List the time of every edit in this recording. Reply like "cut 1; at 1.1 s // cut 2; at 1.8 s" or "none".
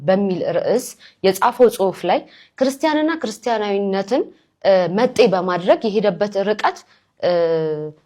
none